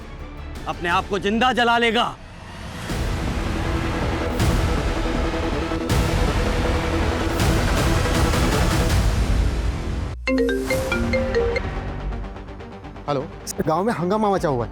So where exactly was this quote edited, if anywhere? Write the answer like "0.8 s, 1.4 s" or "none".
10.1 s